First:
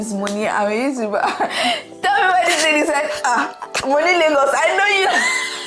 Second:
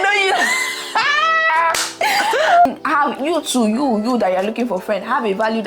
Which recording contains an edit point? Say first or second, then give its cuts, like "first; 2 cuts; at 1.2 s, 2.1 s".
second; 1 cut; at 2.7 s